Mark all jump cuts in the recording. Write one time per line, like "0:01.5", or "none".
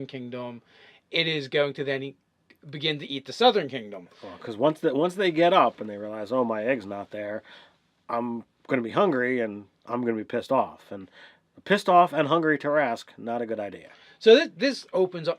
0:01.1